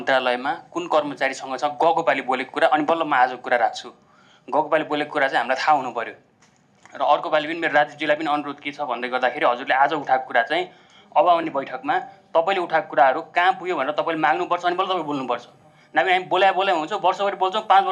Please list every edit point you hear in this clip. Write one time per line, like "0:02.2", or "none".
none